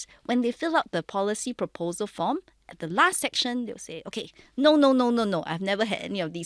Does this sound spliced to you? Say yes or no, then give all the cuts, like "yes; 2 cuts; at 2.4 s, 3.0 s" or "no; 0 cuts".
no; 0 cuts